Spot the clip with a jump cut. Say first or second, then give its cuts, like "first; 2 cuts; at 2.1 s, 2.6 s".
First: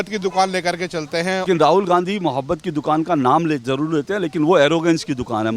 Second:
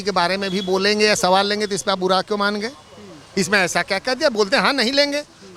first; 1 cut; at 1.5 s